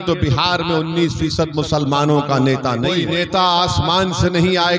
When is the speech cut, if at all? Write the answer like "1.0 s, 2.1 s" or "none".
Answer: 2.8 s